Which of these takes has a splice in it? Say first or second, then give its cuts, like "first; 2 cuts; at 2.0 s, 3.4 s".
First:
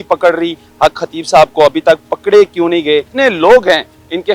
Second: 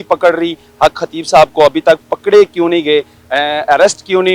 first; 1 cut; at 3.1 s